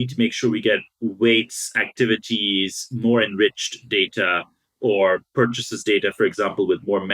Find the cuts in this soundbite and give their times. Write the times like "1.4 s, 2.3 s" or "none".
none

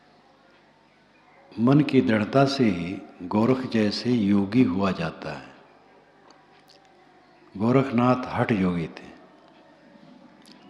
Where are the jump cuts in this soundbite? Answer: none

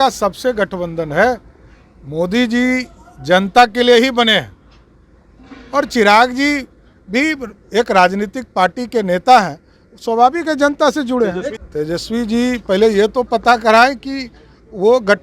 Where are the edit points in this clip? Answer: 11.6 s

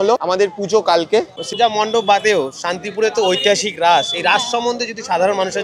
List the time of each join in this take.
1.4 s

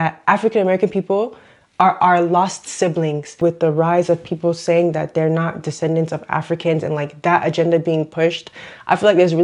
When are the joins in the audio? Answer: 3.4 s

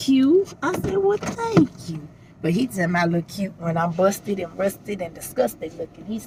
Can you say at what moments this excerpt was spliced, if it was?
none

